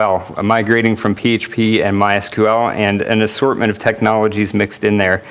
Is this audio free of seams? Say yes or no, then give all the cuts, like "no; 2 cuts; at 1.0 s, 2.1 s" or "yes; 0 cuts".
no; 1 cut; at 2.4 s